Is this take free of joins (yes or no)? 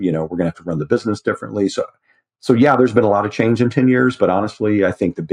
yes